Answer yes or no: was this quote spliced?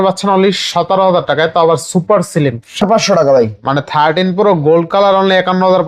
yes